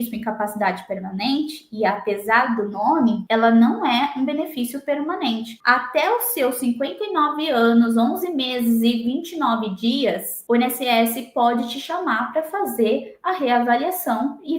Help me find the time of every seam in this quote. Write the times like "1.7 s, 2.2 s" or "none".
3.2 s

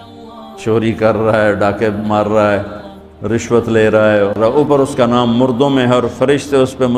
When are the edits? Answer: 4.4 s

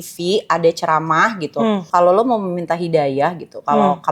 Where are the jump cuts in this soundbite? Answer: 1.9 s

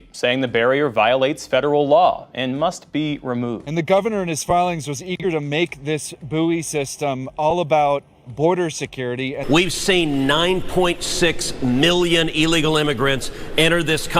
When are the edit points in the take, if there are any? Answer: 3.6 s, 9.4 s

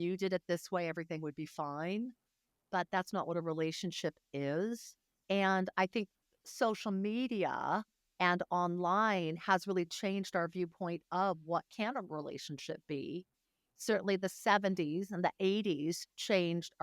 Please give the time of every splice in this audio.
5.1 s

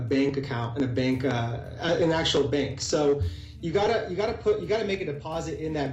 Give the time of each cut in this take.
none

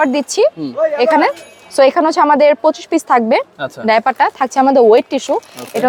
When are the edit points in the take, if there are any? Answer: none

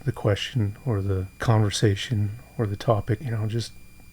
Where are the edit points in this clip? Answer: 1.3 s, 3.3 s

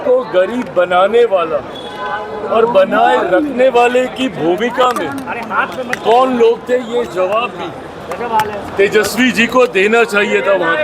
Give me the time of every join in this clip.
none

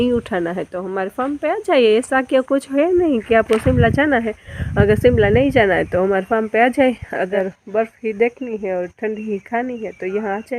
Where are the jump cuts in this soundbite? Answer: 7.3 s

